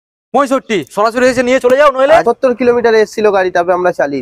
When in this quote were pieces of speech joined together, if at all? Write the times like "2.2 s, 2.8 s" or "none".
2.2 s